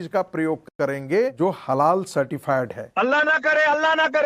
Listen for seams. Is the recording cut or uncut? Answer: cut